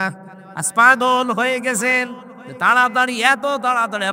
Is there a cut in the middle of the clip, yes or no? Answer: no